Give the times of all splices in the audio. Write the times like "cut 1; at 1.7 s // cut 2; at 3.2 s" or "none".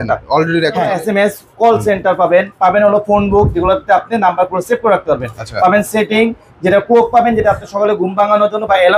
cut 1; at 0.9 s